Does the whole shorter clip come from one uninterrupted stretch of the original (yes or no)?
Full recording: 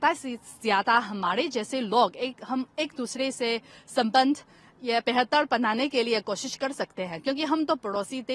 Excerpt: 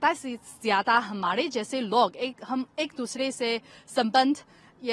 yes